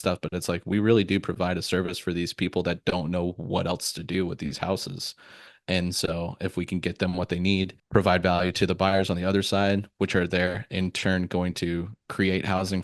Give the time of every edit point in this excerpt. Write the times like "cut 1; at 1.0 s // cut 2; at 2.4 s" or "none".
cut 1; at 7.8 s